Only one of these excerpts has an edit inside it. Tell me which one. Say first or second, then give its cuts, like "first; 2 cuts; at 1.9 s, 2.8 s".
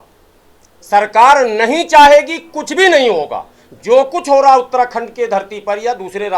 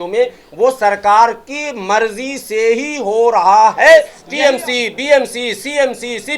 second; 1 cut; at 4.2 s